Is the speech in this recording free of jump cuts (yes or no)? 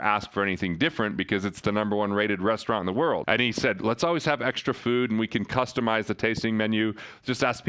no